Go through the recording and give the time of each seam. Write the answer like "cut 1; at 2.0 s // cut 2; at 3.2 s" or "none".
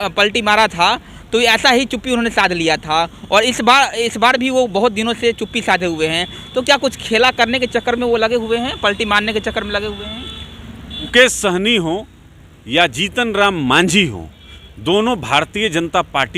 cut 1; at 11.1 s